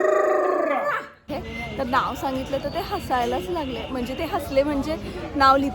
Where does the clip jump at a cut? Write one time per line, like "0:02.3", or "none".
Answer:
0:01.2